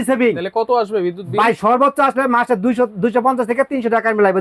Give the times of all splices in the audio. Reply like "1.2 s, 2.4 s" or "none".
none